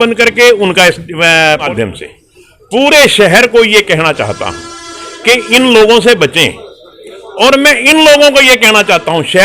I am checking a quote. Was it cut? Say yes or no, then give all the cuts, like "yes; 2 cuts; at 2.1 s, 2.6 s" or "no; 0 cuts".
yes; 1 cut; at 1.7 s